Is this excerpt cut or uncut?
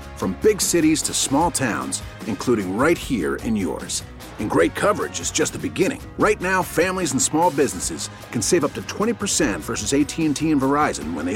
uncut